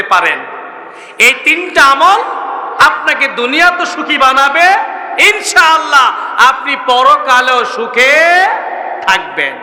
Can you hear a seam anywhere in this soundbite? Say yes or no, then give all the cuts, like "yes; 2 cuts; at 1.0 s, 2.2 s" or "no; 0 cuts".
no; 0 cuts